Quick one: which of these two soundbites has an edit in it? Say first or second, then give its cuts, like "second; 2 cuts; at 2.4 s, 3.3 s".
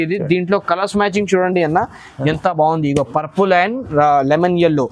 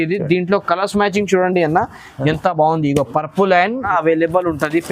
second; 1 cut; at 3.8 s